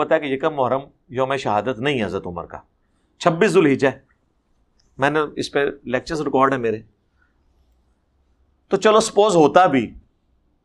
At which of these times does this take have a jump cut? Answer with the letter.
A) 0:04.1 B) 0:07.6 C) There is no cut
C